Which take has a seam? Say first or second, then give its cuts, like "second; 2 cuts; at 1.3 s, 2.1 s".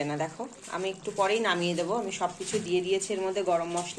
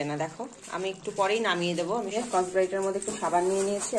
second; 1 cut; at 2.1 s